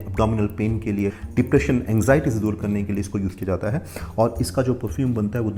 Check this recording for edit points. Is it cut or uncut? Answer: uncut